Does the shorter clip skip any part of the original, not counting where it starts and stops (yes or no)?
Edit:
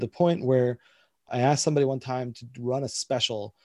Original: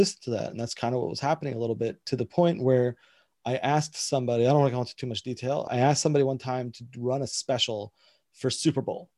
yes